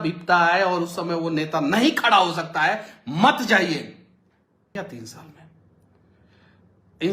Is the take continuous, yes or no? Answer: no